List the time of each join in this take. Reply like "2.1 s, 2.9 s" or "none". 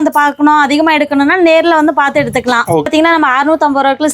2.9 s